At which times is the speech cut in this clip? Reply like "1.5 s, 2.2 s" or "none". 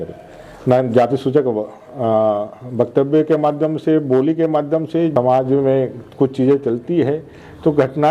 5.1 s